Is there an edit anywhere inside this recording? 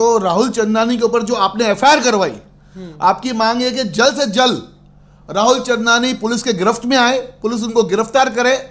no; 0 cuts

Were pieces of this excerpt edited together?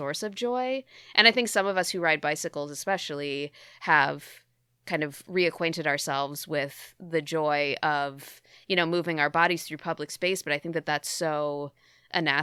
no; 0 cuts

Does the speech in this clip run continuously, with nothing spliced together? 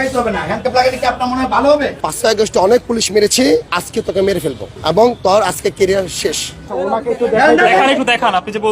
no; 4 cuts; at 2.0 s, 3.8 s, 4.7 s, 6.7 s

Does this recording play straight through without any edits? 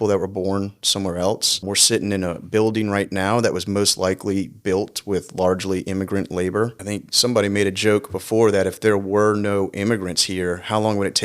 no; 2 cuts; at 1.6 s, 6.8 s

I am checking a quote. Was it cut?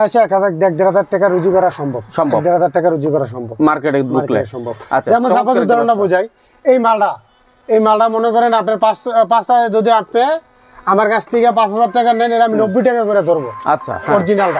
no; 0 cuts

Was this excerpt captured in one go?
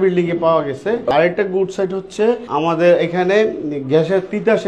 no; 2 cuts; at 1.1 s, 2.4 s

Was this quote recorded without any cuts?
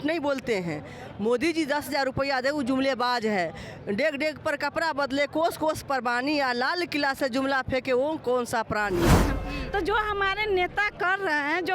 no; 1 cut; at 9.2 s

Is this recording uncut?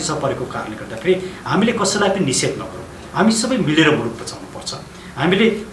yes; 0 cuts

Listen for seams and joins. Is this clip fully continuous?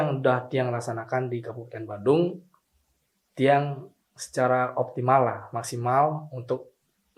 yes; 0 cuts

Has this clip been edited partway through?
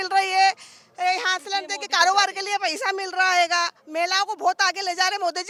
no; 0 cuts

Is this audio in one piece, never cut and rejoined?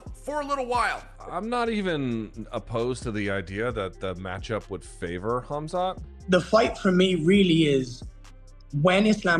no; 2 cuts; at 1.1 s, 6.1 s

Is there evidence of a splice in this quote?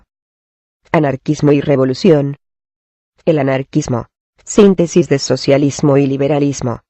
yes; 1 cut; at 5.3 s

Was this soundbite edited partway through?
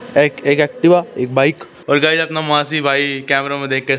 yes; 1 cut; at 1.7 s

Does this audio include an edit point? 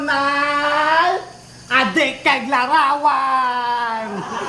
no; 0 cuts

